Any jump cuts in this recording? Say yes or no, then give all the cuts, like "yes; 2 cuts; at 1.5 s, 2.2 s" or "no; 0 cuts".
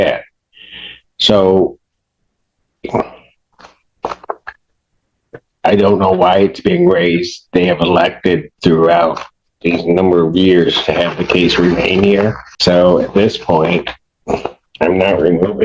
yes; 1 cut; at 12.5 s